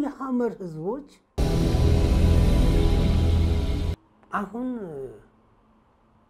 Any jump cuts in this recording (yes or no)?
yes